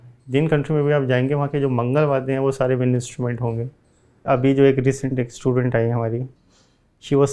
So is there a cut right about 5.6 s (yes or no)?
no